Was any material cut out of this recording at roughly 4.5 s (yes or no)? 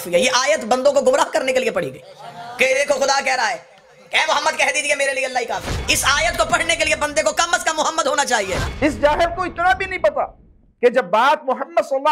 no